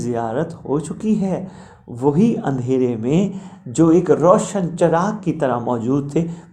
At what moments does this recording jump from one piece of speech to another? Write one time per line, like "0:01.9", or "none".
none